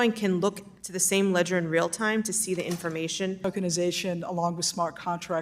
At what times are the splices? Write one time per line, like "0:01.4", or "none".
0:03.4